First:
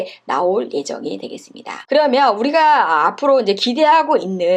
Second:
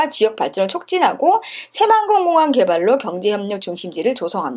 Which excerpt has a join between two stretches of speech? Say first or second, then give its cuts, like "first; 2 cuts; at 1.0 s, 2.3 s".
first; 1 cut; at 1.7 s